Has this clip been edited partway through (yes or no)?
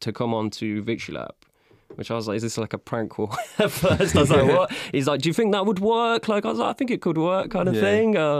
no